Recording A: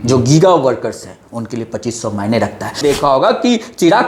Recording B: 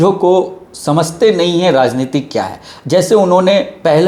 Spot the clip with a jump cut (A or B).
A